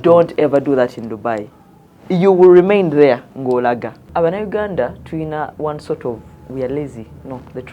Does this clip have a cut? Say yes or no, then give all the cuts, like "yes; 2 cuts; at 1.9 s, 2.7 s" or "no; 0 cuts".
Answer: yes; 1 cut; at 4.1 s